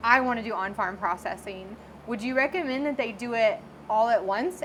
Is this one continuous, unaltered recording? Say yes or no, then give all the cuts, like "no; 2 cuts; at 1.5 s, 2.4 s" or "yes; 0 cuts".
yes; 0 cuts